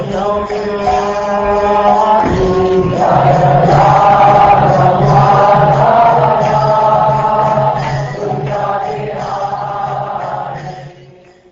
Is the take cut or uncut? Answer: cut